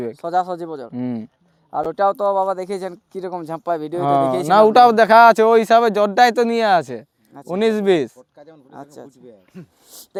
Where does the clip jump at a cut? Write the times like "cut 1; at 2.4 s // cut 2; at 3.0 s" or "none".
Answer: none